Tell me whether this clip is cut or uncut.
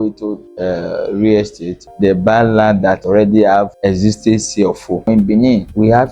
cut